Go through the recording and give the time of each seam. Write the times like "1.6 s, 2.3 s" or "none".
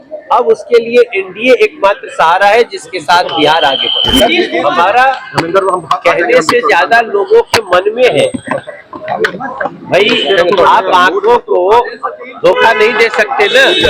4.5 s